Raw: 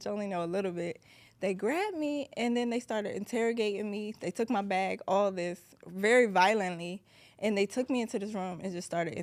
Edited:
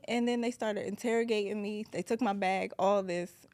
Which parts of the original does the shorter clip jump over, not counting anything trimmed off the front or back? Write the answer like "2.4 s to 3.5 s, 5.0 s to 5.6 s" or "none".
none